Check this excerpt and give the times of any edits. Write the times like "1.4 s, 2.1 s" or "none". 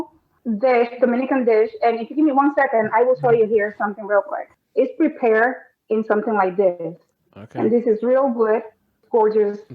4.5 s